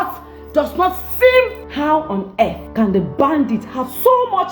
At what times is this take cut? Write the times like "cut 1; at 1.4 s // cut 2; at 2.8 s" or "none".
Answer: cut 1; at 1.6 s // cut 2; at 2.6 s